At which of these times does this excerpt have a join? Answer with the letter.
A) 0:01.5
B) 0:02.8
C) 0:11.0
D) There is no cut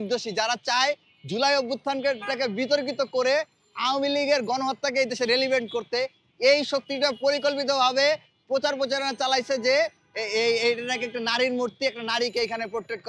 D